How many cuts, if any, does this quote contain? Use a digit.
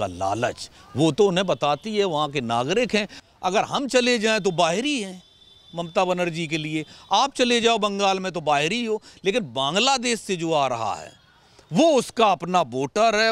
1